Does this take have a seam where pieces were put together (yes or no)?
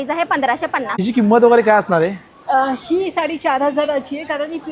yes